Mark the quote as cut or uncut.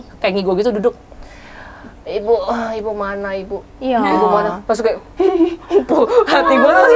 uncut